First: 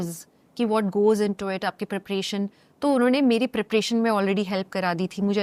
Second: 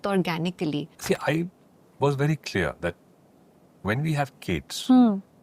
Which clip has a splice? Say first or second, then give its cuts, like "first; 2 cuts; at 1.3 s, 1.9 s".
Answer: second; 1 cut; at 0.9 s